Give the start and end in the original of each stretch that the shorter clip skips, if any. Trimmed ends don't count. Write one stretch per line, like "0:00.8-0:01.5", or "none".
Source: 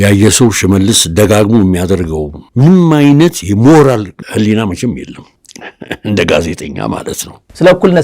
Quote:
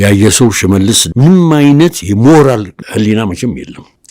0:01.0-0:02.4